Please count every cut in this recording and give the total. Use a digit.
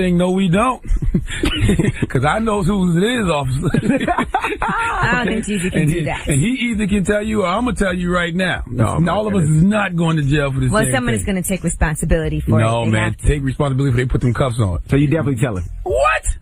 1